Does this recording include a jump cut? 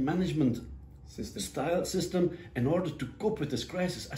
no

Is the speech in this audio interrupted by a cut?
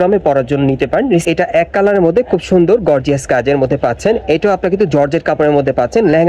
yes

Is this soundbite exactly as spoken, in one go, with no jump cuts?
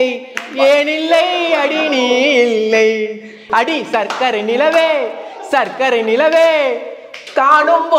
no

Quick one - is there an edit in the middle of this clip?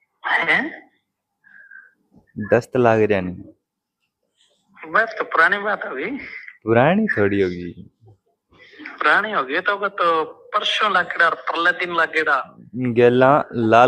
yes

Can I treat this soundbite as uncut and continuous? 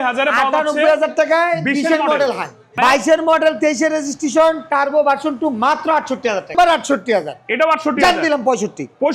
no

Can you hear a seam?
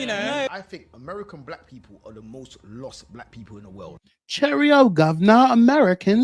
no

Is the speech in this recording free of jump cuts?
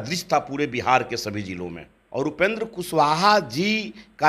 no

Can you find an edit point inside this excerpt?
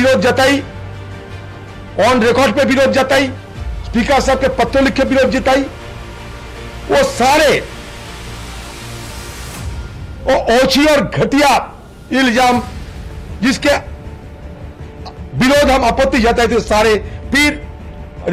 no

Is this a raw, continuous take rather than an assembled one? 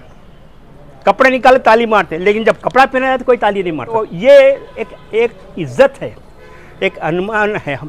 yes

